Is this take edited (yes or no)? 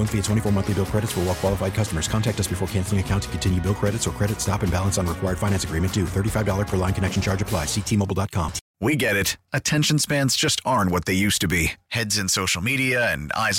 yes